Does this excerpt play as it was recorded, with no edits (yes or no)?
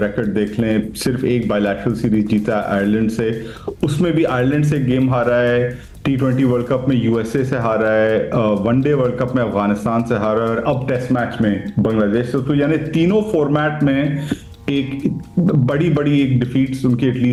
yes